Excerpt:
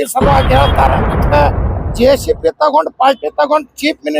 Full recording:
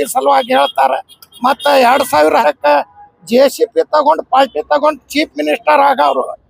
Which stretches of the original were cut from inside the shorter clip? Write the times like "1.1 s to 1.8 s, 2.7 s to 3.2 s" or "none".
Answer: 1.2 s to 2.6 s